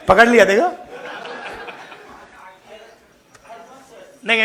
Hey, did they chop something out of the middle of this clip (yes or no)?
no